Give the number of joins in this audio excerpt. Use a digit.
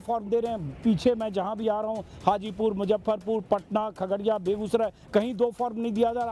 0